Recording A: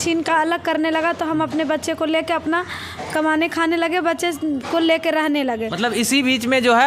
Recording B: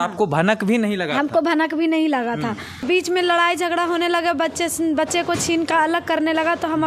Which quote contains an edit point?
B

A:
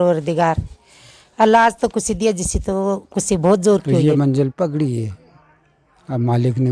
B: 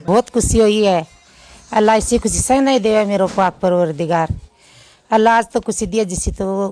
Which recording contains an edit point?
A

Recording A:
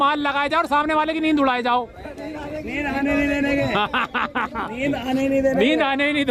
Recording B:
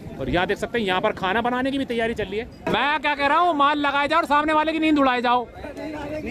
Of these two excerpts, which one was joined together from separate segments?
B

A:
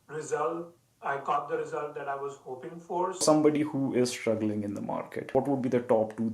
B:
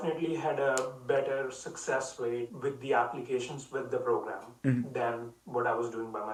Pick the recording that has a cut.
A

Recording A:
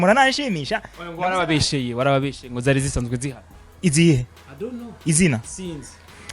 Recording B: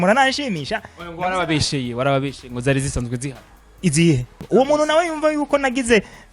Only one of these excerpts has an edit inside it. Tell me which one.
B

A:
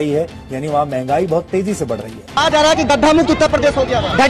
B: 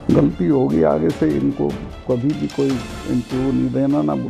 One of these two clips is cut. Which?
A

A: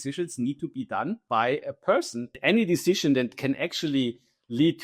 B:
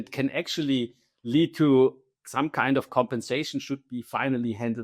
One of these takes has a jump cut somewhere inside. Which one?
A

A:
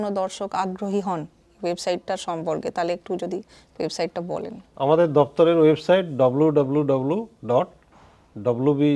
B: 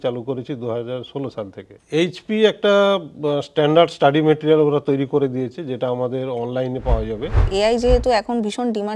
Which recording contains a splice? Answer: B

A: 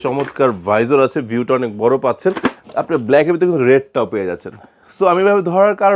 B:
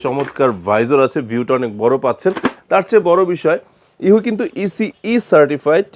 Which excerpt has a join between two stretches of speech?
A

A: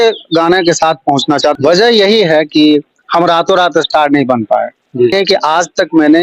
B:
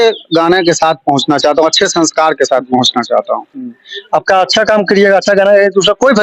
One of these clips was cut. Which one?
A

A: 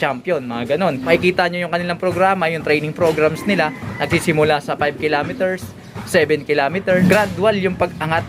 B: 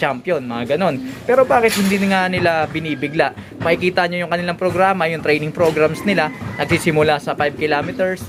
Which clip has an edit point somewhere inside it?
A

